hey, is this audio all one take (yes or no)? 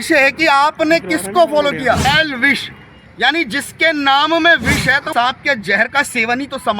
no